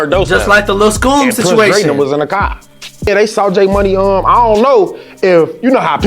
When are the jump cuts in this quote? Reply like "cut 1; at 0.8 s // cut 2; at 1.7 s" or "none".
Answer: cut 1; at 3.1 s